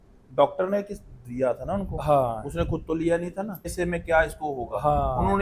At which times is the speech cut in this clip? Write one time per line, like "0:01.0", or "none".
0:03.7

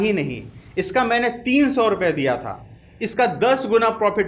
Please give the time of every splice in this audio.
0:02.6

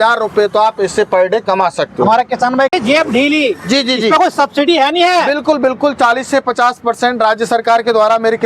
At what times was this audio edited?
0:02.7

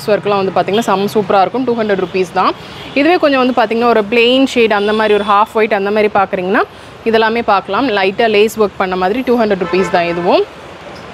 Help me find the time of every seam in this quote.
none

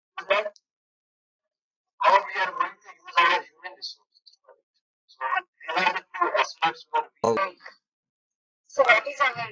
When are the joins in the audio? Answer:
0:07.3

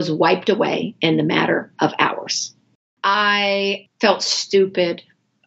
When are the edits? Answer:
0:02.9
0:03.9

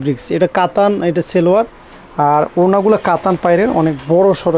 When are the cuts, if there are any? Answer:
none

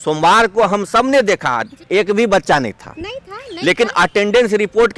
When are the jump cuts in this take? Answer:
0:01.7

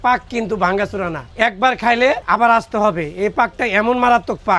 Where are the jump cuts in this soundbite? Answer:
none

